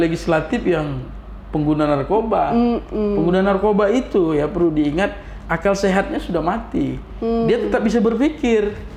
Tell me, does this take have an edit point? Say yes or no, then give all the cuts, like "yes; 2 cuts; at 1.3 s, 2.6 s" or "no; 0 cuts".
no; 0 cuts